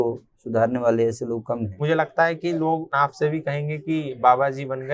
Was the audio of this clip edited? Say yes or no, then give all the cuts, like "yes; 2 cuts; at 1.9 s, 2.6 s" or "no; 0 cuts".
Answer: yes; 2 cuts; at 1.8 s, 2.9 s